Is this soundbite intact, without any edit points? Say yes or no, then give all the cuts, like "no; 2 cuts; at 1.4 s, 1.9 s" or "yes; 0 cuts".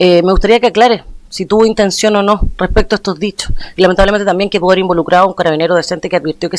yes; 0 cuts